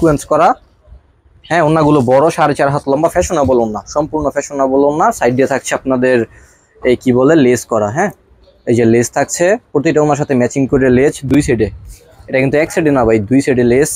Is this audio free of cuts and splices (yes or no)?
yes